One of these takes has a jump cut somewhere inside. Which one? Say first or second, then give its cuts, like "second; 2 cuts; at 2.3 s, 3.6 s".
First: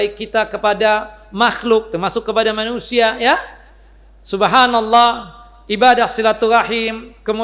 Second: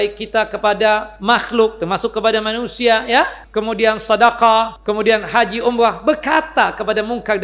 second; 3 cuts; at 1.1 s, 3.4 s, 4.8 s